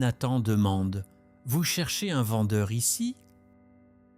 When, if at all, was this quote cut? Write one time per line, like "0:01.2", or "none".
0:03.2